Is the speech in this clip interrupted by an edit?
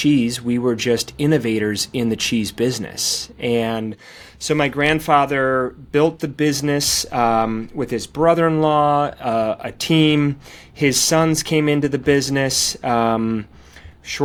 no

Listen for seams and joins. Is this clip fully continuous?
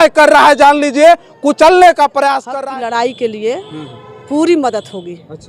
no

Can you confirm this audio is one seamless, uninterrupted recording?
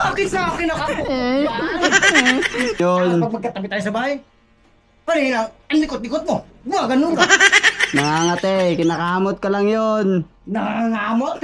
no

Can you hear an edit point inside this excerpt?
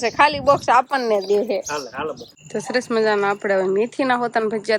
yes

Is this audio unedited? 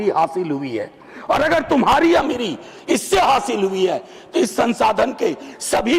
yes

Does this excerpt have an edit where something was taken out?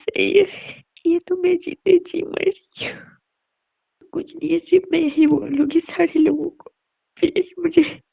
yes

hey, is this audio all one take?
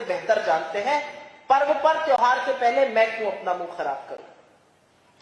yes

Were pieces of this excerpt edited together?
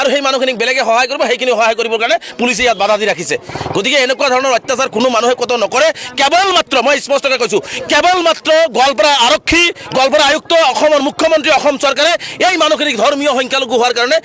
no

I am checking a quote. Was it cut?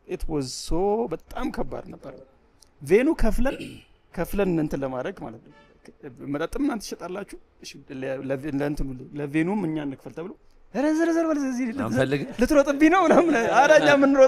no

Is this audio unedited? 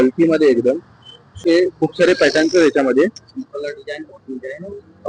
no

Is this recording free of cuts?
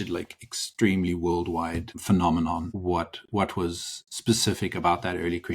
no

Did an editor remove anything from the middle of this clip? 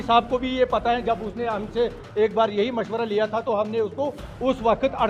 no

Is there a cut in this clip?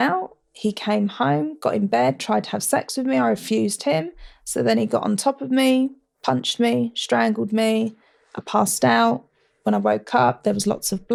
no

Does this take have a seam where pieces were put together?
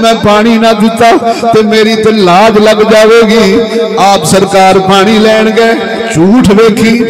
no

